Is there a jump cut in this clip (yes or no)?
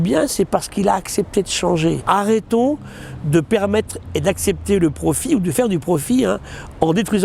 yes